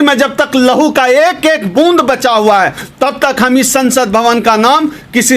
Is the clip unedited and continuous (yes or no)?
yes